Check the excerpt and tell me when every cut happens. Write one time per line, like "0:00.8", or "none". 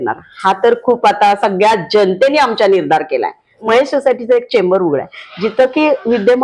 0:03.6